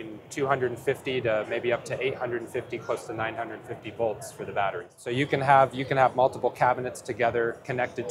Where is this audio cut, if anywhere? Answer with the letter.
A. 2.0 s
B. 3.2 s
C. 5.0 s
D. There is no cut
C